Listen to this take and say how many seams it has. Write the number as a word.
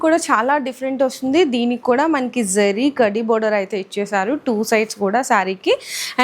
zero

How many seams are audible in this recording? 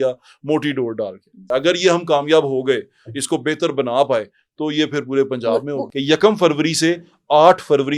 two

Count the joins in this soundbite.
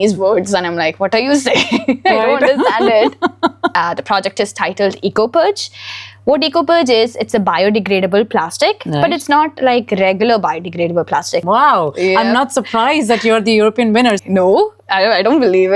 three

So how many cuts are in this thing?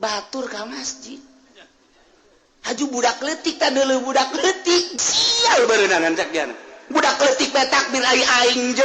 one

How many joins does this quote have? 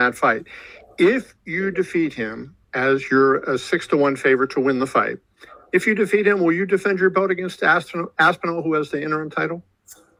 zero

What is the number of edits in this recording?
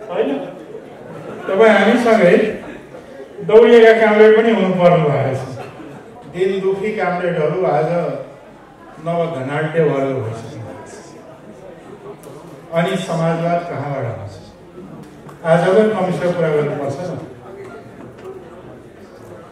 one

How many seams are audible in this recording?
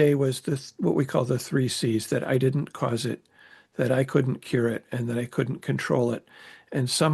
zero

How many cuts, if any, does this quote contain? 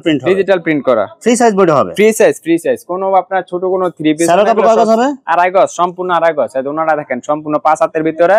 zero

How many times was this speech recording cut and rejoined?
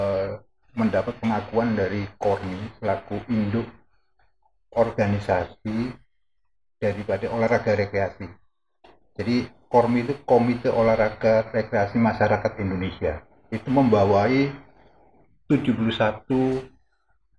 zero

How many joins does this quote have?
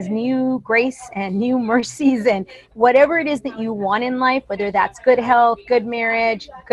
one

